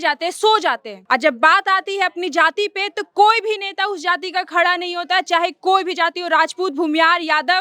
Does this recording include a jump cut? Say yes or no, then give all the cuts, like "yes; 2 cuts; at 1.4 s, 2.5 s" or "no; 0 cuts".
no; 0 cuts